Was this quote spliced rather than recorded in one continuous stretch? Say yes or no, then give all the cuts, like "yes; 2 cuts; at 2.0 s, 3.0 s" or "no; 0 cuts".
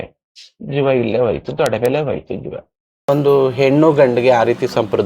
yes; 1 cut; at 2.9 s